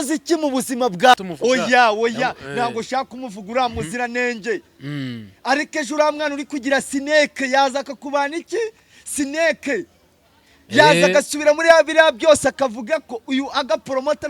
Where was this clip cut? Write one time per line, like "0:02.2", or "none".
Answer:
0:01.1